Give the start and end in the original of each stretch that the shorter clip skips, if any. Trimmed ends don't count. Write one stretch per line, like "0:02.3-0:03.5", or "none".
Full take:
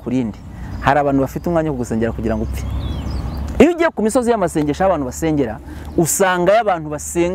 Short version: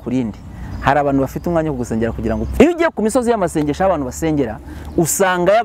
0:02.5-0:03.5